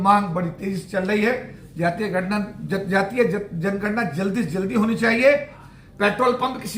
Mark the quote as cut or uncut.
cut